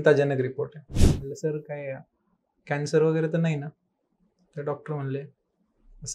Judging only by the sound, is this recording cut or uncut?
cut